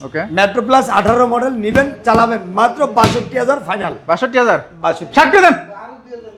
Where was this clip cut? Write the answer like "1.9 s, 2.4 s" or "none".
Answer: none

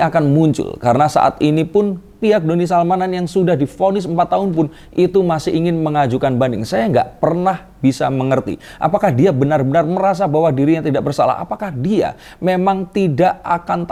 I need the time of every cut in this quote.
none

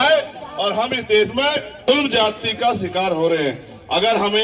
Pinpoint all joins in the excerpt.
1.9 s

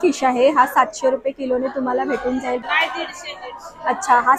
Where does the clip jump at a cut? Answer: 2.6 s

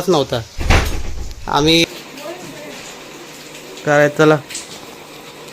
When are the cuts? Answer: 1.8 s

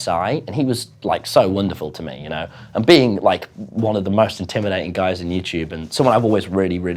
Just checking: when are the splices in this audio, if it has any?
none

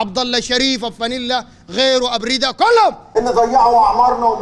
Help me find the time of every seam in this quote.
3.0 s

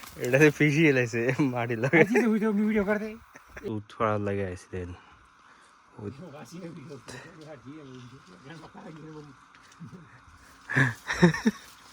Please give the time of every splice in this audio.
3.6 s

